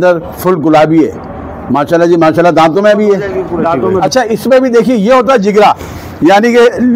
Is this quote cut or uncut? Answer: cut